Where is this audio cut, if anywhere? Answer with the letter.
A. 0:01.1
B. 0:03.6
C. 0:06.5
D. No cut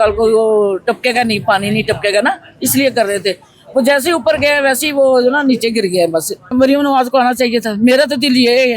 C